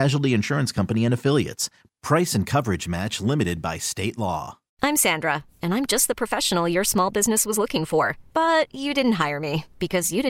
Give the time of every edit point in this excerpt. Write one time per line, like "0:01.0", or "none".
0:04.6